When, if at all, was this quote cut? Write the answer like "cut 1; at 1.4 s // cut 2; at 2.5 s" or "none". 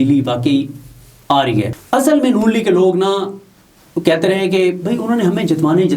cut 1; at 1.8 s